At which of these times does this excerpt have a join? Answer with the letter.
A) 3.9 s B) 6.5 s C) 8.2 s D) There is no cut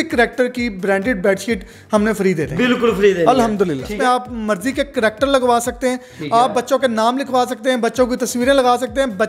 A